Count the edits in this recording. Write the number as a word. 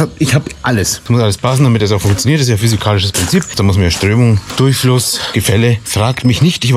four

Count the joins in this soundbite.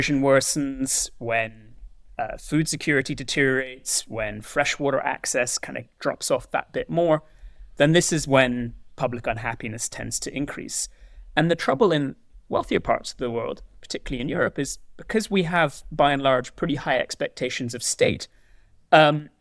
zero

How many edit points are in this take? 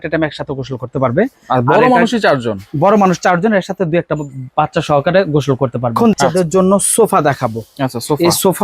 one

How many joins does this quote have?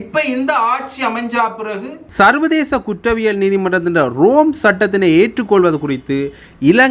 one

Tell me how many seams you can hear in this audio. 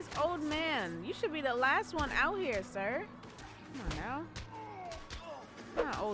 one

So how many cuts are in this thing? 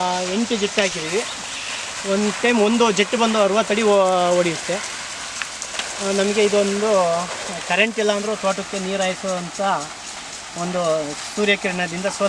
zero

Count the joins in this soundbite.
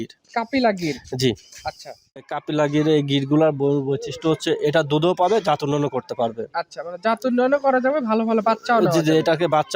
one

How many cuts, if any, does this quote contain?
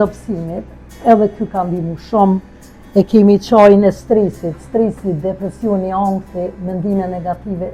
zero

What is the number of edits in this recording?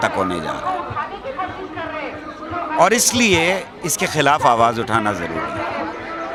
zero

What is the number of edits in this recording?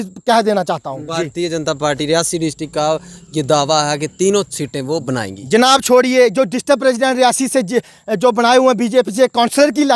one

